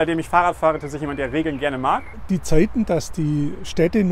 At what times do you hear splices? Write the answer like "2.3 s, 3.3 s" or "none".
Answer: 2.1 s